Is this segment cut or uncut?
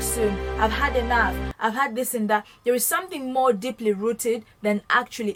uncut